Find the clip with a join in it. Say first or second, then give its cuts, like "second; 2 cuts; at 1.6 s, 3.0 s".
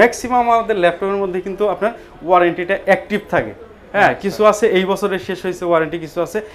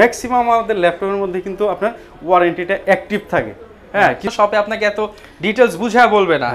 second; 1 cut; at 4.3 s